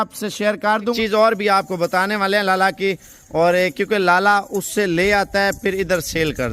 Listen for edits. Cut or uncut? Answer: cut